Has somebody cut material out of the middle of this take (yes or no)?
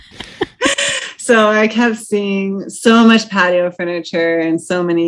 no